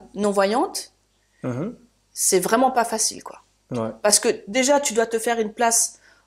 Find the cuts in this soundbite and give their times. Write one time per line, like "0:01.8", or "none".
none